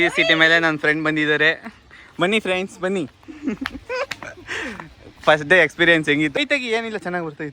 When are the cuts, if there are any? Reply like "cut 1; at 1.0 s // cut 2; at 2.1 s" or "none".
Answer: cut 1; at 6.4 s